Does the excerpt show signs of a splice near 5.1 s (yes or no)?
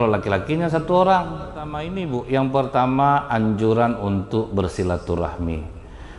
no